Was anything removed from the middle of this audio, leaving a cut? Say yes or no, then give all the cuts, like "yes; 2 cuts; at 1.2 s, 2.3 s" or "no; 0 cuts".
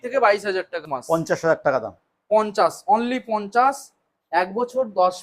yes; 1 cut; at 0.9 s